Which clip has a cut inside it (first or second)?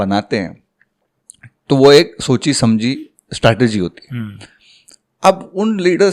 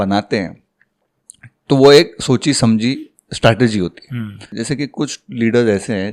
second